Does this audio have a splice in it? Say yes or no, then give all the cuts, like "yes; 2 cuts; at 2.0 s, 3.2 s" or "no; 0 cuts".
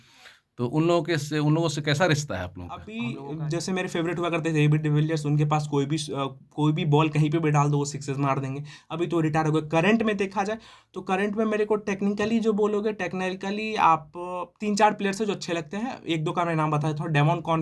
yes; 1 cut; at 2.9 s